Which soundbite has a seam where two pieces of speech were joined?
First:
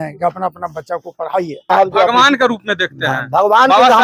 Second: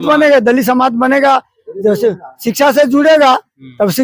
first; 1 cut; at 1.7 s

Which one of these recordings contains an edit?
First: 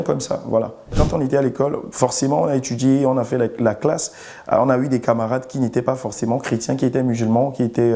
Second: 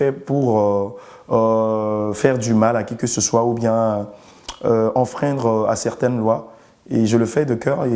first; 1 cut; at 0.9 s

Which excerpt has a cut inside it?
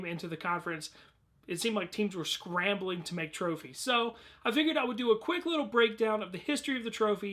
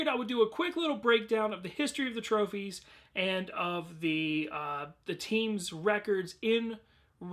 second; 1 cut; at 4.5 s

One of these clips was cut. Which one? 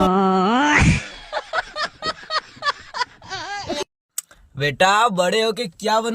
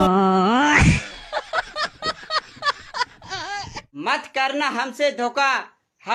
first; 1 cut; at 3.7 s

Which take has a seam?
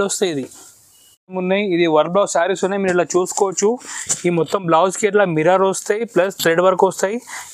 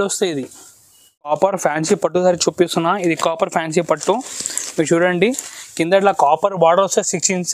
second; 1 cut; at 1.3 s

